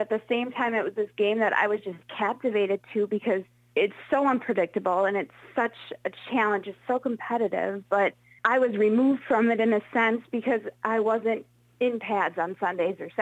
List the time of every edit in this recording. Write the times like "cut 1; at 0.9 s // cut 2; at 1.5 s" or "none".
cut 1; at 3.6 s // cut 2; at 8.3 s